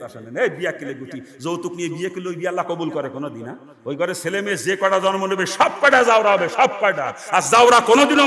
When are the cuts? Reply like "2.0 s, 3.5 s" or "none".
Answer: none